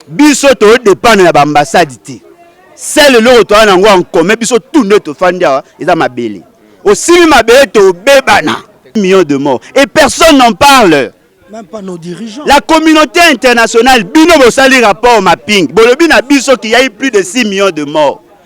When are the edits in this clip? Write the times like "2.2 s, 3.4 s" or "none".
9.0 s